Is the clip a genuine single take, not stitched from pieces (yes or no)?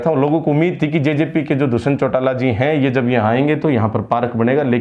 yes